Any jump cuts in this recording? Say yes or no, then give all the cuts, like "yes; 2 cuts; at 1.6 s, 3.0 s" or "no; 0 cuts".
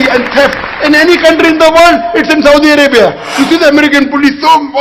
yes; 1 cut; at 3.3 s